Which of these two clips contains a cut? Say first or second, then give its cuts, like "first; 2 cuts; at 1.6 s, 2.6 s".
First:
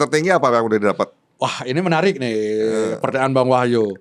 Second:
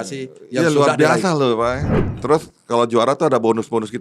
second; 1 cut; at 1.9 s